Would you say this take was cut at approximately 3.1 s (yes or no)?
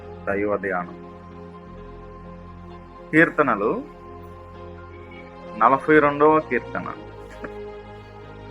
yes